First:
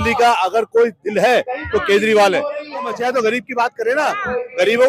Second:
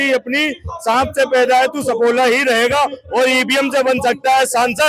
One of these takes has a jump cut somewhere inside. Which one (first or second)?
first